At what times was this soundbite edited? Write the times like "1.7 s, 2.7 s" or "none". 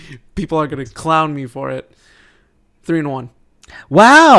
none